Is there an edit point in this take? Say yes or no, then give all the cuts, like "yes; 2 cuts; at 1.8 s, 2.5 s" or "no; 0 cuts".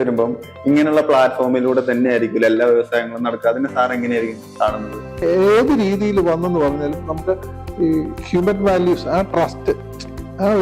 yes; 1 cut; at 5.2 s